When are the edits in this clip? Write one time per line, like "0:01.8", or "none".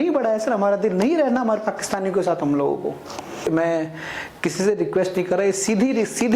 0:03.4